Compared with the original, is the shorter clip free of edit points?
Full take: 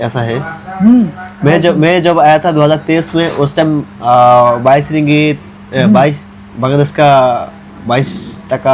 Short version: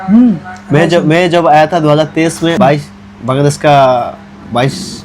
no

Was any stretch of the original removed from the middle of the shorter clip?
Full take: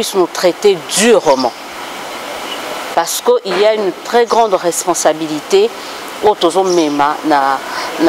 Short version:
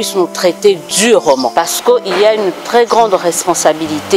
yes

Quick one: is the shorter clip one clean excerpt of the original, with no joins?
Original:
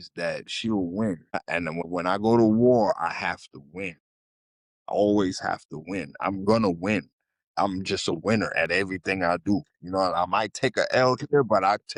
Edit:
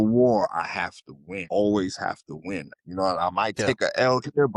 no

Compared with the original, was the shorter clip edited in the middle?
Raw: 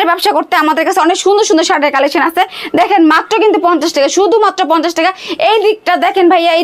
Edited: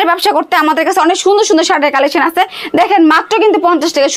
no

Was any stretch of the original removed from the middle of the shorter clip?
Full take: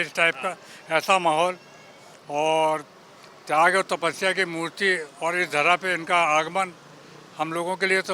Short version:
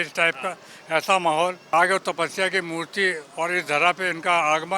yes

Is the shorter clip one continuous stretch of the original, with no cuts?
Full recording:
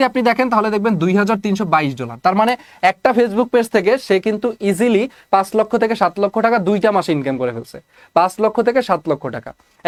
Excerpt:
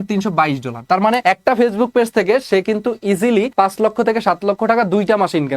no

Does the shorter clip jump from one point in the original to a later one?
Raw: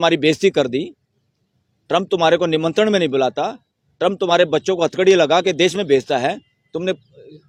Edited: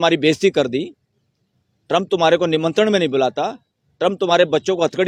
no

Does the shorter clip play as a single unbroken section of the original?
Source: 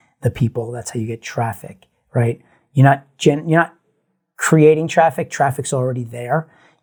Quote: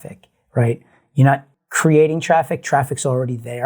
no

